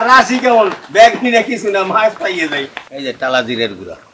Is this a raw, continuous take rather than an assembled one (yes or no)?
no